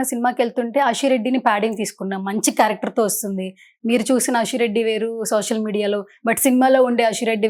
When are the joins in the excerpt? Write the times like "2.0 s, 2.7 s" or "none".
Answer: none